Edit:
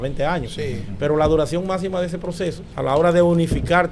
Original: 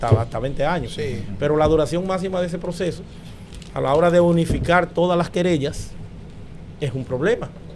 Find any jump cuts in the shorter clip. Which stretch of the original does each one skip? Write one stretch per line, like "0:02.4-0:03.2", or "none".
0:03.1-0:03.6